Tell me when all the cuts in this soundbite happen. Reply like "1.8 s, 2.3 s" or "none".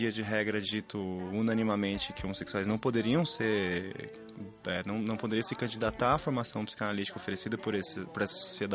none